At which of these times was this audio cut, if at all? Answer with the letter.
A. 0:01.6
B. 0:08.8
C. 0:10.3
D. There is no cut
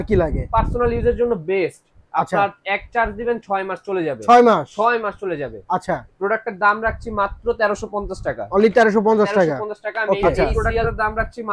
C